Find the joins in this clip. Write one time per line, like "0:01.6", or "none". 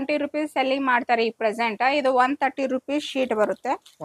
none